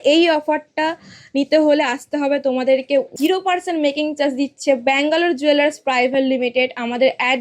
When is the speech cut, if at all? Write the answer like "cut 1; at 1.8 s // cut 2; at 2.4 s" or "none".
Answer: cut 1; at 3.1 s